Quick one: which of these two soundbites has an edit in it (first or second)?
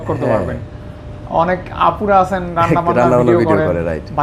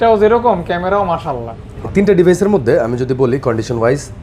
second